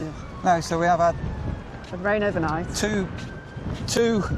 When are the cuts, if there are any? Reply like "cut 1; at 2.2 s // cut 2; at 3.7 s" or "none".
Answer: none